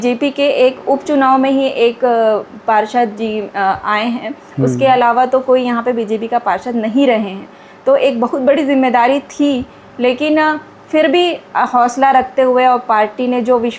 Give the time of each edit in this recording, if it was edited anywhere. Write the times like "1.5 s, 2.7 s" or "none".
none